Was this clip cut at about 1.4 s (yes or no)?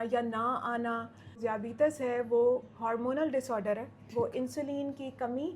yes